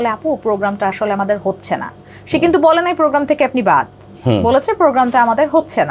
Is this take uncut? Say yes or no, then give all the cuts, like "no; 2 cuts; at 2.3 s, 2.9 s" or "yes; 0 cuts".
yes; 0 cuts